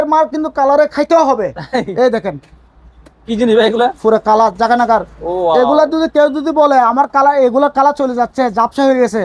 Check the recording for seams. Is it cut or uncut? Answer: uncut